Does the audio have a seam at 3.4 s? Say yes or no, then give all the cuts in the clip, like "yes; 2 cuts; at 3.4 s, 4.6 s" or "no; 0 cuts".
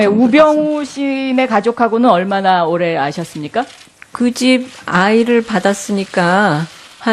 yes; 1 cut; at 3.4 s